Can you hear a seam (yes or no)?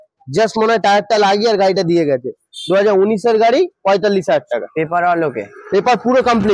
no